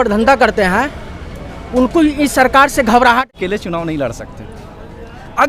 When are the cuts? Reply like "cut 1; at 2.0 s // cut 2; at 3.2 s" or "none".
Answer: cut 1; at 3.3 s